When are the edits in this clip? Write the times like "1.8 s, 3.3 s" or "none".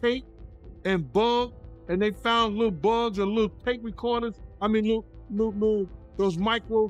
none